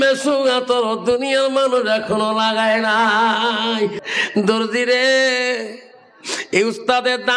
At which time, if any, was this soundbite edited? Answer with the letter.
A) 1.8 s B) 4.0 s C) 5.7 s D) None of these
B